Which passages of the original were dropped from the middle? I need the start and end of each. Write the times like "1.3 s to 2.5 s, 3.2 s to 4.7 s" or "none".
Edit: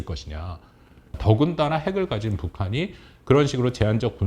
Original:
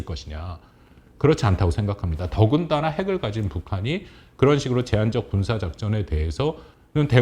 1.0 s to 2.1 s